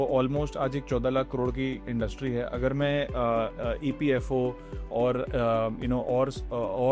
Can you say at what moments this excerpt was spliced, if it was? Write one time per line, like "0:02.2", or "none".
none

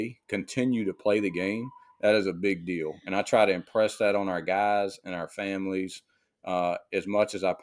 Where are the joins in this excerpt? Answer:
none

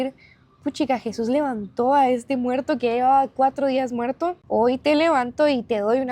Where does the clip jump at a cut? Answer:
0:04.4

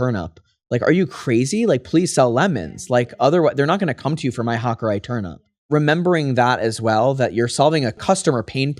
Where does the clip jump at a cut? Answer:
0:05.7
0:08.0

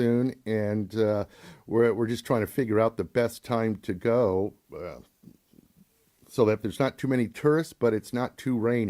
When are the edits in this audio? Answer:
none

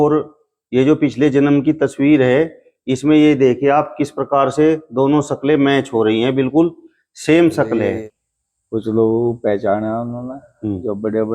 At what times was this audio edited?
0:08.0

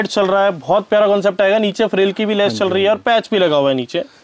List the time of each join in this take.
none

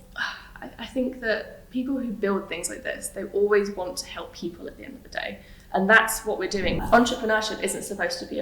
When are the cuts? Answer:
0:06.8

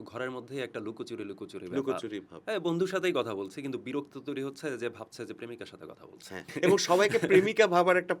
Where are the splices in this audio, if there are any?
0:06.5

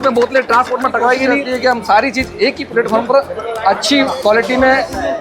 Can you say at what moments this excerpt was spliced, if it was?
0:01.4

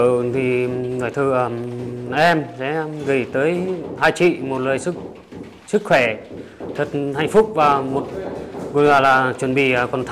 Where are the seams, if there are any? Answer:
none

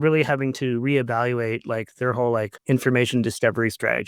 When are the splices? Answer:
0:02.6

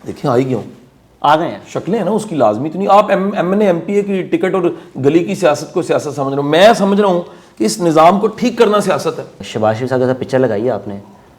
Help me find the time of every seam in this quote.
0:09.4

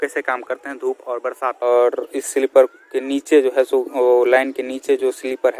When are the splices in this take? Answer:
0:01.6

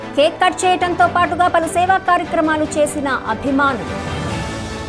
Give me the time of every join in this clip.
none

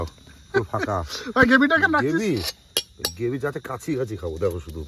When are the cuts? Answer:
none

